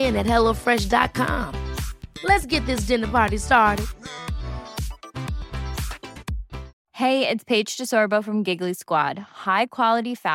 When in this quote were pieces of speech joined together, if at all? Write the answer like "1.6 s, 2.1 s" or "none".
6.8 s